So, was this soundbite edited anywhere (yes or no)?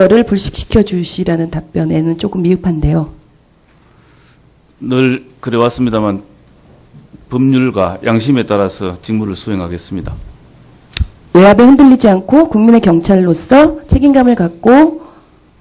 yes